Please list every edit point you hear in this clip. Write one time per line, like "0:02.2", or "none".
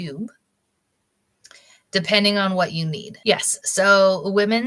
0:03.0

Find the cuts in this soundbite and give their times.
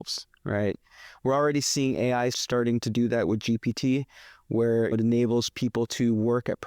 0:02.4
0:04.9

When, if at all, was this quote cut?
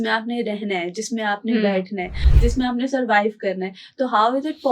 none

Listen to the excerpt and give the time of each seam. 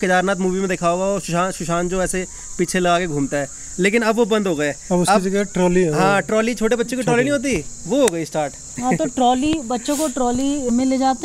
none

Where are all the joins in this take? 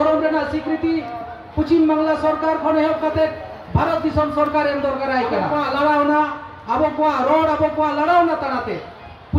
0:05.5

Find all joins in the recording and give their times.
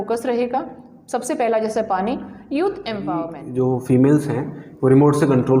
0:03.4

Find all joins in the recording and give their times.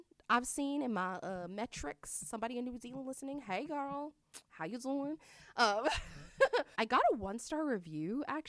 0:06.7

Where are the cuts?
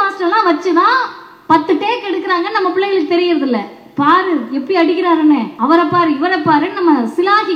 0:05.5

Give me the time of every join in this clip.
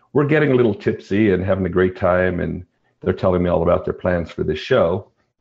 none

